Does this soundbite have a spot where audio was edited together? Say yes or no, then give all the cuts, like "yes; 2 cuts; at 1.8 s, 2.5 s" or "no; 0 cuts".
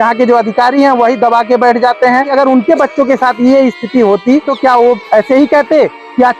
yes; 2 cuts; at 2.3 s, 4.5 s